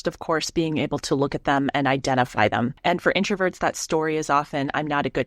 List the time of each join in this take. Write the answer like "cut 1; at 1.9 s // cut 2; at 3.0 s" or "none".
cut 1; at 2.8 s